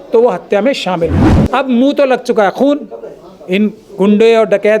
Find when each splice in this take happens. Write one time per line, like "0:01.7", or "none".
0:01.3